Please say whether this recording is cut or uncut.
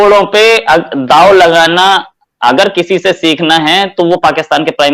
uncut